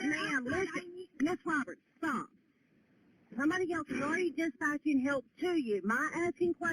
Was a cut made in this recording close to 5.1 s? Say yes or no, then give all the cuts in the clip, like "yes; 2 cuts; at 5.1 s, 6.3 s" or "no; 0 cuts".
no; 1 cut; at 1.8 s